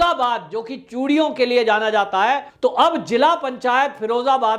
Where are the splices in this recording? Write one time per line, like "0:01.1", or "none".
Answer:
0:02.5